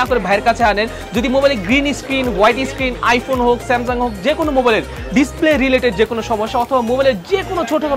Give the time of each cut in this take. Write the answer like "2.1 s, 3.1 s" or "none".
none